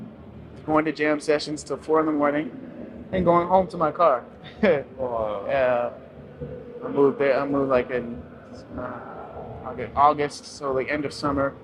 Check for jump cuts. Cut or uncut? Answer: uncut